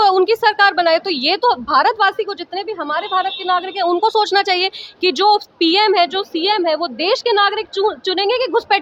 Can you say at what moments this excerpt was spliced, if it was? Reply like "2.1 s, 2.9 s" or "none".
none